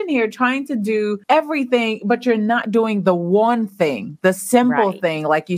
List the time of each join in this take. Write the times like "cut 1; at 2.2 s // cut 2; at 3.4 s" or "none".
cut 1; at 1.2 s